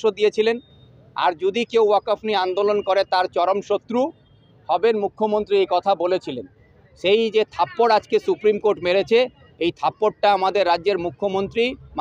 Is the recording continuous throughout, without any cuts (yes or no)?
yes